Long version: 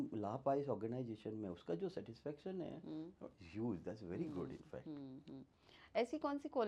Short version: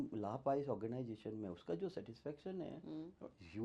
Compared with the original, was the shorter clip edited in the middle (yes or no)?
no